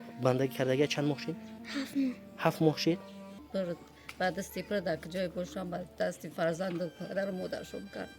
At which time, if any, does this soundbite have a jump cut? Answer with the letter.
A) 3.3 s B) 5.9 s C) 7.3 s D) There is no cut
A